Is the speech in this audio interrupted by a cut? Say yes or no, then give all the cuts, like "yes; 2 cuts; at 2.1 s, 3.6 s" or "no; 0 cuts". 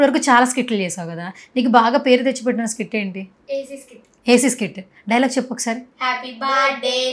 no; 0 cuts